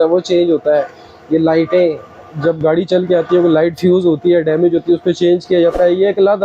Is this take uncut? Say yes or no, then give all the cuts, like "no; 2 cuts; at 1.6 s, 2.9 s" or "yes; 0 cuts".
yes; 0 cuts